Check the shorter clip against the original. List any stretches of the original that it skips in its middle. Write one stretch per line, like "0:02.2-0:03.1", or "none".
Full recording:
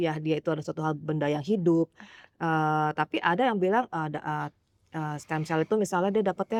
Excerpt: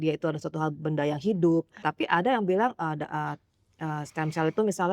0:02.1-0:03.0